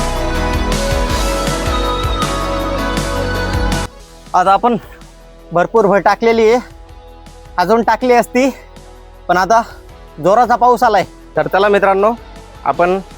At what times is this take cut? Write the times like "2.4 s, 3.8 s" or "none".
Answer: 3.9 s, 11.2 s